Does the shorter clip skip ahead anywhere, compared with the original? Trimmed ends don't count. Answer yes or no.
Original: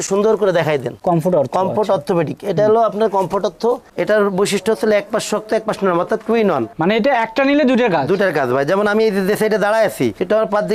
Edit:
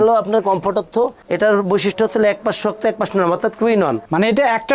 no